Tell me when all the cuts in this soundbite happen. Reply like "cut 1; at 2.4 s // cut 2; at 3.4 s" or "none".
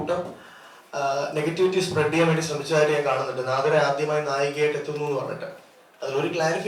none